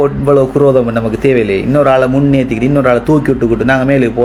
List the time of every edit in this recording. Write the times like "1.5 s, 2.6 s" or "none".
none